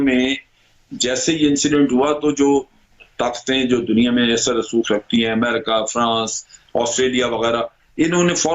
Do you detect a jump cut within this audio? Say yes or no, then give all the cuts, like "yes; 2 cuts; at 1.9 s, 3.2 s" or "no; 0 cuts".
no; 0 cuts